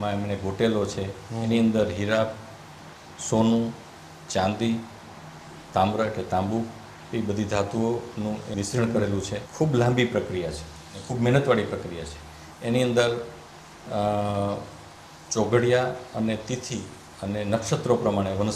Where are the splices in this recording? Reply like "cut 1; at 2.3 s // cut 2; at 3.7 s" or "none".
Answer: cut 1; at 8.5 s // cut 2; at 9.4 s